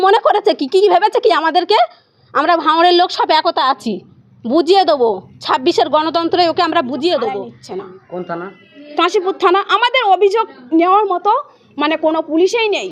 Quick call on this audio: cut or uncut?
cut